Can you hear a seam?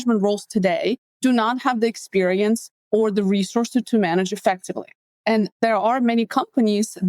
yes; 3 cuts; at 1.1 s, 2.7 s, 5.4 s

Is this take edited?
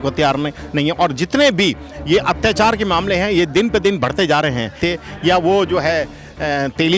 yes; 1 cut; at 4.8 s

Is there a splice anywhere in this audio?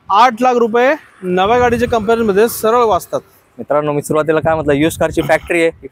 no; 0 cuts

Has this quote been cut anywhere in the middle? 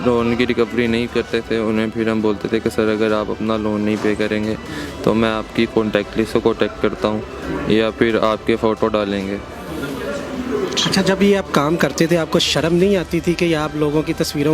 no; 0 cuts

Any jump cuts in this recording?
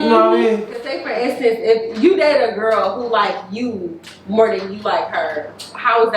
yes; 1 cut; at 1.0 s

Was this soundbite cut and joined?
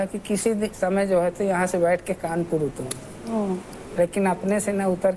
no; 0 cuts

